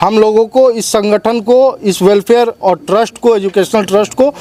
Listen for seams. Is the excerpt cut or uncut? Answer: uncut